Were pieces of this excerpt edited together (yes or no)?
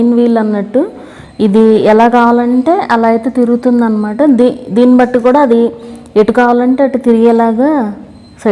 no